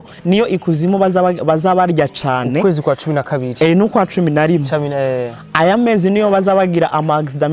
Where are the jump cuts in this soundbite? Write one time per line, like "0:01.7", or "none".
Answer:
none

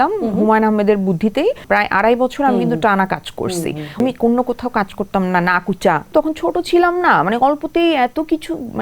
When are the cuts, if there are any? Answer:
0:01.6
0:04.0
0:06.1

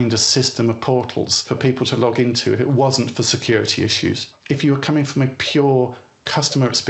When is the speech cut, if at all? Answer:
0:01.4

